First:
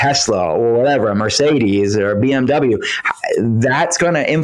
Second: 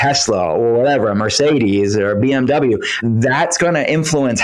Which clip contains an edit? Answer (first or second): second